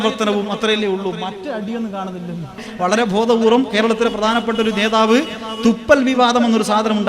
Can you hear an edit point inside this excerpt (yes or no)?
yes